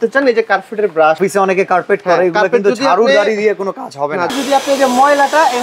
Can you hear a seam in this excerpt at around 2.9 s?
no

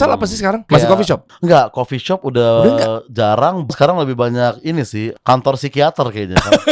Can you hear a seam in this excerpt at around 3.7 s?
yes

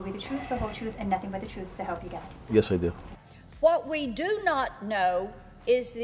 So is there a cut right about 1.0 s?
no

